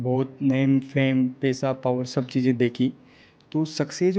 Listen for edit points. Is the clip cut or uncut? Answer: uncut